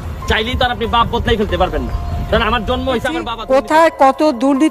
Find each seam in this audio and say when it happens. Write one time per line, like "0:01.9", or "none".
0:03.3